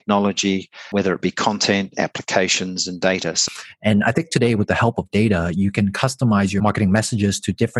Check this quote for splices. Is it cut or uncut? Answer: cut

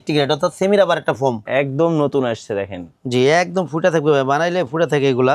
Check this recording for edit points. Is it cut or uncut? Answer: cut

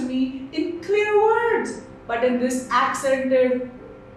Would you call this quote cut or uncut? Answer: uncut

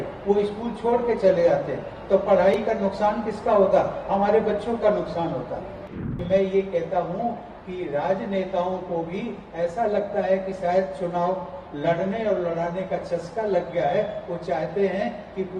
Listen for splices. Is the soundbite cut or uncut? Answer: cut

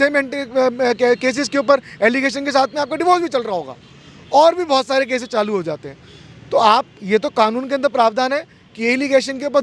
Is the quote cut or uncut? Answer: uncut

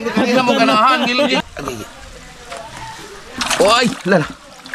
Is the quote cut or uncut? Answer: cut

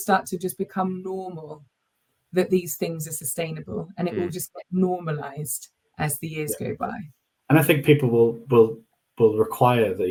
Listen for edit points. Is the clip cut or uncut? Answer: uncut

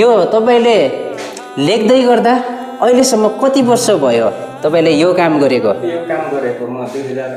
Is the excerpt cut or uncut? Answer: uncut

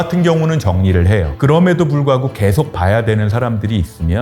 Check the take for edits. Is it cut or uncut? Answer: cut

